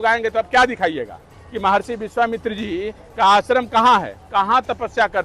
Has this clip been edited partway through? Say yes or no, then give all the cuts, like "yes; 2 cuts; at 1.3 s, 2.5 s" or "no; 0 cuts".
no; 0 cuts